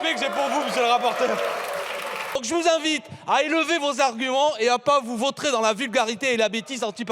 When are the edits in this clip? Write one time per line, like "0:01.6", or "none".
0:02.4